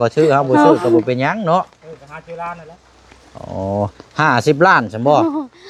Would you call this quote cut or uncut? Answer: uncut